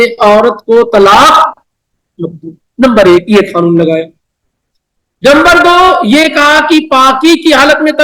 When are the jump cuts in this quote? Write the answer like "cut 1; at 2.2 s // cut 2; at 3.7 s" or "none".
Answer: none